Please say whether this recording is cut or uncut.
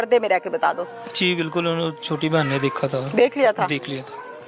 uncut